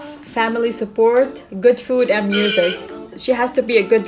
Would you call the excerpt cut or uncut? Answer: cut